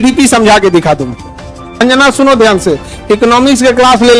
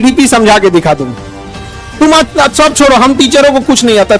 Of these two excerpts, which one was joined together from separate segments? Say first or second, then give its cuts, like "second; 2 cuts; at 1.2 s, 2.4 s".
first; 1 cut; at 1.8 s